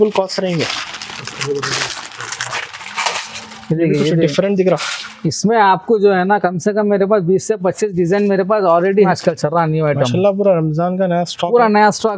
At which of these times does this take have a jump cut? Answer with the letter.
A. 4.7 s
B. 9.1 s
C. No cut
B